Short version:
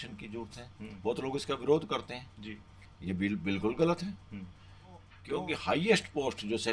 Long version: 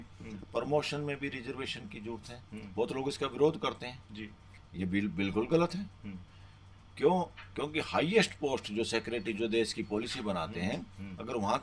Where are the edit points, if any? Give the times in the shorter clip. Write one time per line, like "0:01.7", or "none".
0:05.1